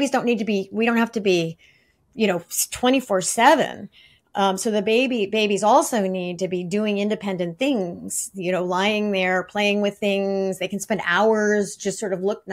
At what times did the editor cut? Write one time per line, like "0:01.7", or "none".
none